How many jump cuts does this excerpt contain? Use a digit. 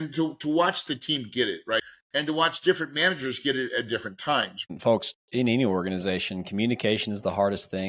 2